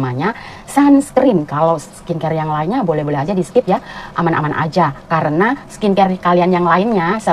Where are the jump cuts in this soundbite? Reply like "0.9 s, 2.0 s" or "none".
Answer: none